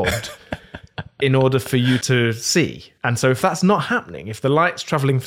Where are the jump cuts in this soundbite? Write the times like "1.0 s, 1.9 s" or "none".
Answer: 2.5 s